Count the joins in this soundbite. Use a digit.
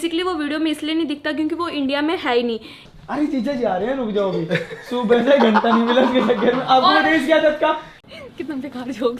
2